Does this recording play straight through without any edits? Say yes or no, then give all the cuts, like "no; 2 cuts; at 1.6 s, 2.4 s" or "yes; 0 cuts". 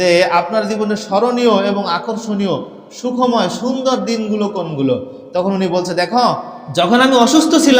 no; 1 cut; at 6.5 s